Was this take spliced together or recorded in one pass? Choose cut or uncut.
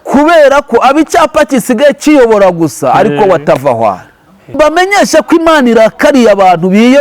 cut